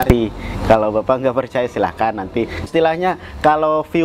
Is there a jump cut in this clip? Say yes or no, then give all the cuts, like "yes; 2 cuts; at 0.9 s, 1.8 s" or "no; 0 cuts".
yes; 1 cut; at 2.7 s